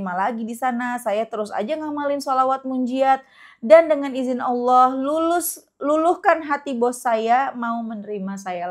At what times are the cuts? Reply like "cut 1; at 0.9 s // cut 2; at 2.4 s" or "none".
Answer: none